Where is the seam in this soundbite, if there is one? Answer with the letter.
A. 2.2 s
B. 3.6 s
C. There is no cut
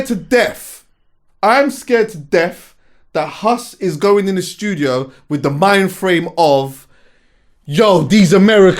C